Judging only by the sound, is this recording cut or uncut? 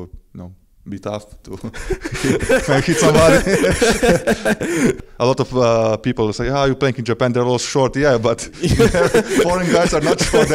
cut